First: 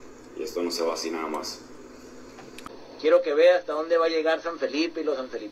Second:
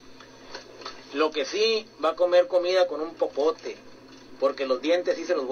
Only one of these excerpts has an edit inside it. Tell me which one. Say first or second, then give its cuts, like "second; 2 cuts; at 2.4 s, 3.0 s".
first; 1 cut; at 2.7 s